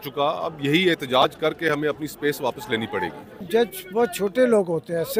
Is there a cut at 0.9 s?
no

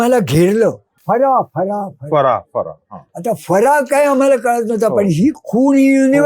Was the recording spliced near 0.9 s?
yes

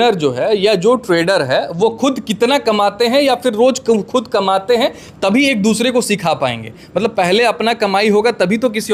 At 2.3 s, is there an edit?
no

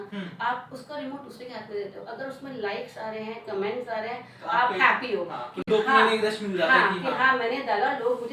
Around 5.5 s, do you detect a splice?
no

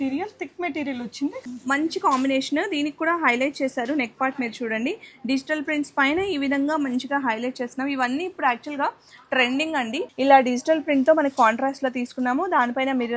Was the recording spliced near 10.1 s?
yes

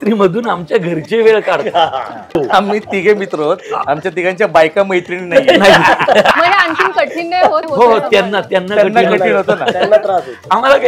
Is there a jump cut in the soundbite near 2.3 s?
yes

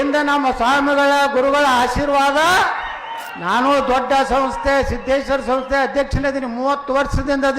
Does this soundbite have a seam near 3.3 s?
yes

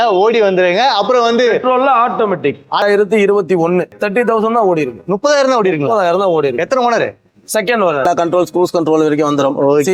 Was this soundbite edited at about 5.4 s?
no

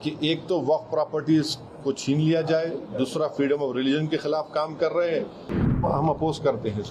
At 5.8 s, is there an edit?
yes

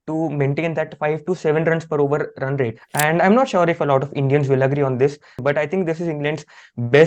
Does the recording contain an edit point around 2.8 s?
yes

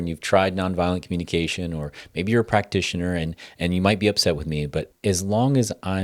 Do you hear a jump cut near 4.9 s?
yes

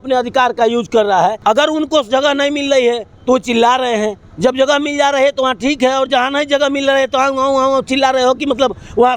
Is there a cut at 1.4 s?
yes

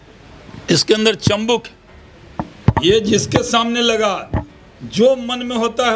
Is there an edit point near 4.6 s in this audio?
no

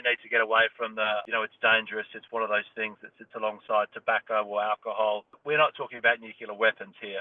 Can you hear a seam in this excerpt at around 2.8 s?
no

